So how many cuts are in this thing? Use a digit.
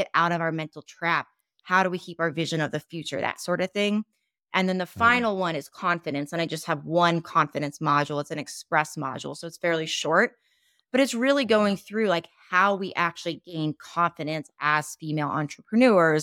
1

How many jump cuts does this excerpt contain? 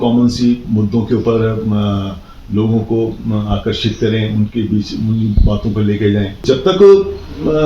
1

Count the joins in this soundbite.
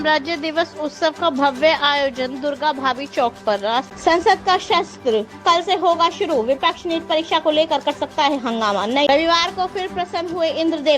2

